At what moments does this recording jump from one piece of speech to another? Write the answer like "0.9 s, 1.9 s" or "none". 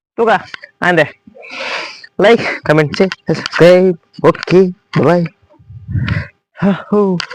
none

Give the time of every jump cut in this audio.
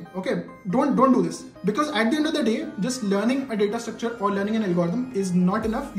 none

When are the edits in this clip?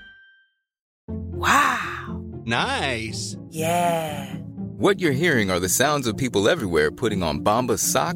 1.0 s

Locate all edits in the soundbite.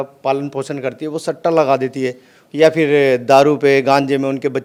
none

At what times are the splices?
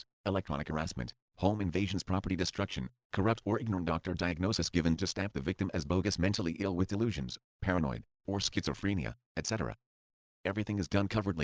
none

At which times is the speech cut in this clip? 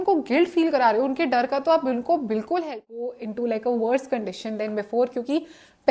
3.1 s

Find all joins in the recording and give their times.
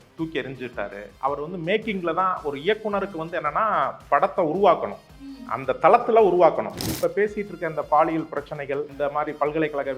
1.1 s, 6.9 s, 8.9 s

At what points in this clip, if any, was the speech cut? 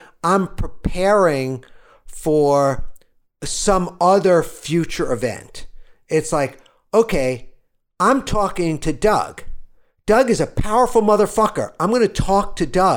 none

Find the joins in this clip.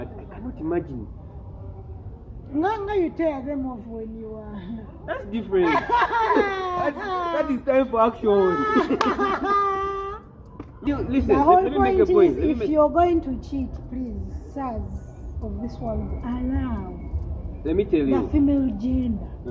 10.8 s

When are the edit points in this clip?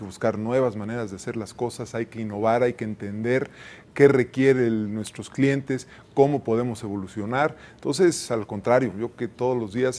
none

